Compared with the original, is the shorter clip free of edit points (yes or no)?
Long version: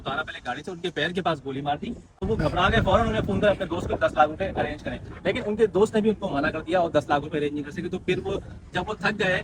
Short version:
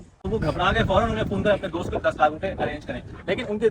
yes